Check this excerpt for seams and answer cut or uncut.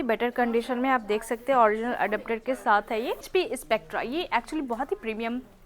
cut